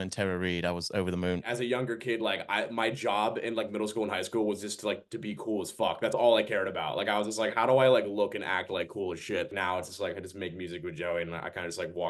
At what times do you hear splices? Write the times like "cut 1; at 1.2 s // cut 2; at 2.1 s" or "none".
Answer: cut 1; at 1.5 s // cut 2; at 9.5 s